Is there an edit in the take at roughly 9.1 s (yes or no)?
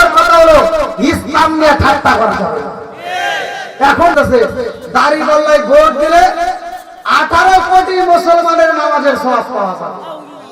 no